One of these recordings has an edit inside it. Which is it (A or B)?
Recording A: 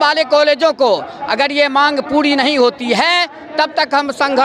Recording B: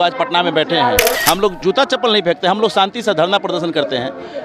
B